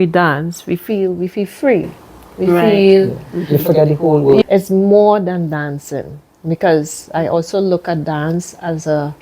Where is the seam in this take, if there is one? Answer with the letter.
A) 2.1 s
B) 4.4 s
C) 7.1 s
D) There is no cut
B